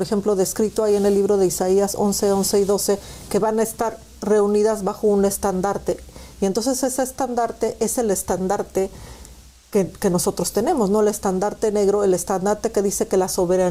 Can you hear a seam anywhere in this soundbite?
no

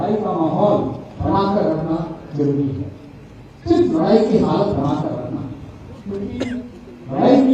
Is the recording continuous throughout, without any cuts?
yes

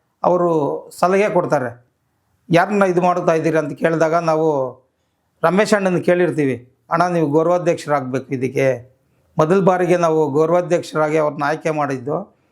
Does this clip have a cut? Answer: no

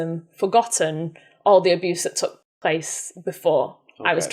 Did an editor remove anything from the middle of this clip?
yes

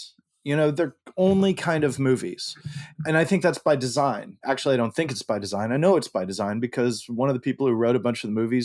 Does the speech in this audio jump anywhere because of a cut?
yes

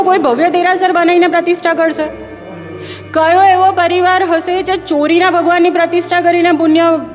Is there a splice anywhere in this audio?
no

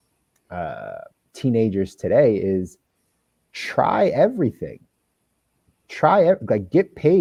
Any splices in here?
no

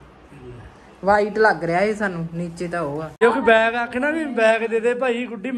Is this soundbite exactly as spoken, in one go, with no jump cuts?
no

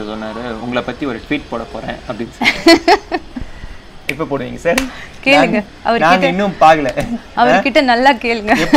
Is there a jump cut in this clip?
no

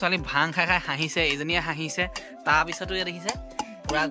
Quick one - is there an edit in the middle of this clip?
no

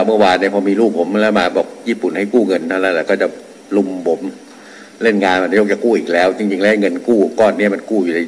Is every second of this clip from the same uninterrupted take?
yes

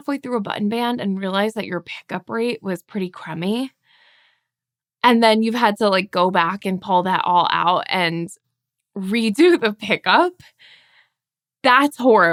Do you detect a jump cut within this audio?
no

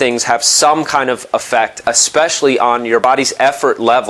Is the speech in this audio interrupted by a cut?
yes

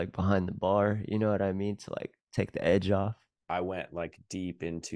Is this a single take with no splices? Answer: no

